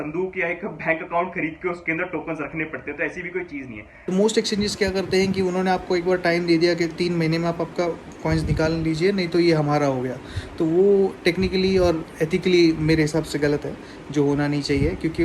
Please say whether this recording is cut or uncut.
cut